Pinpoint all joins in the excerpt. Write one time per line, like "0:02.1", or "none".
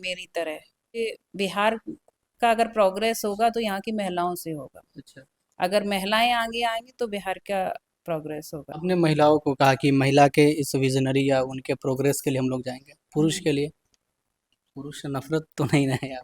0:01.0
0:08.7